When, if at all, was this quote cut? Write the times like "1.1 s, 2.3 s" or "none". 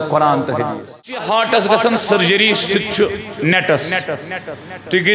1.1 s

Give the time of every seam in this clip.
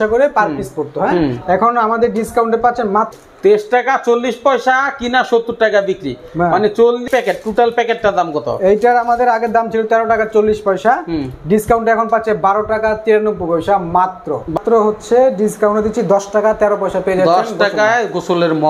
3.1 s, 7.0 s, 14.5 s

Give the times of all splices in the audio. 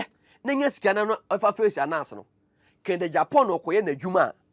none

